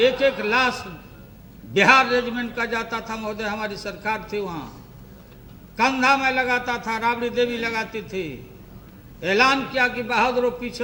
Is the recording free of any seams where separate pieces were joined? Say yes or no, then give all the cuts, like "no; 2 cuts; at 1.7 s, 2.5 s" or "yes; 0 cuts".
yes; 0 cuts